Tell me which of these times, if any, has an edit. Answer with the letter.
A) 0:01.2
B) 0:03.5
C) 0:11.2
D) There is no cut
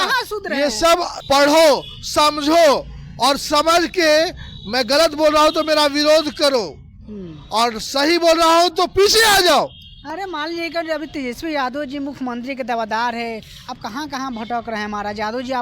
A